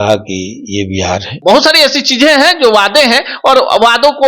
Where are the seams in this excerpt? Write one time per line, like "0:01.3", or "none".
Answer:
0:01.3